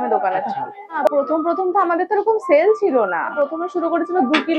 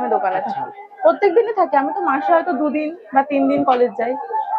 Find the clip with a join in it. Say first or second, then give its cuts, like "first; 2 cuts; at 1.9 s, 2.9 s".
first; 2 cuts; at 1.1 s, 3.3 s